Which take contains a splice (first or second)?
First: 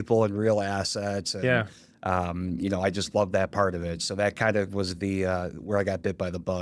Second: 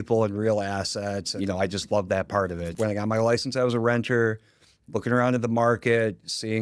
second